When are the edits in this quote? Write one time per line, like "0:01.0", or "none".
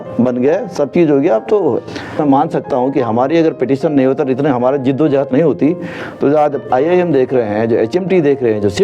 0:02.2